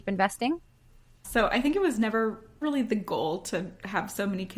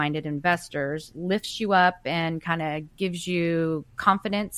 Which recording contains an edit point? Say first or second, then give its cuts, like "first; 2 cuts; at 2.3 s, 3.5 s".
first; 1 cut; at 1.2 s